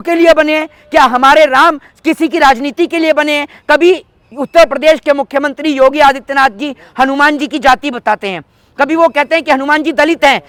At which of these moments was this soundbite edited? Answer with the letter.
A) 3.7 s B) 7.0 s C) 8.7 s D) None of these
D